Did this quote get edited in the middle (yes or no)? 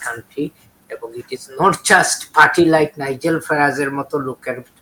no